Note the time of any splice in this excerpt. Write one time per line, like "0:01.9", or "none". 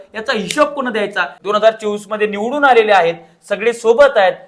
0:01.3